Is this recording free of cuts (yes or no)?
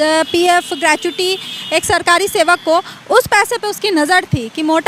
yes